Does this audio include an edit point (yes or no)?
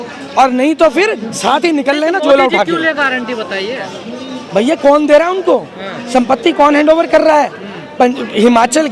no